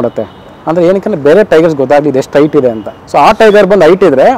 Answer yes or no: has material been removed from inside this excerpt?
no